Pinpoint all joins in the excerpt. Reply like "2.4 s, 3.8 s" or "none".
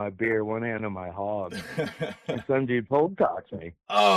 2.9 s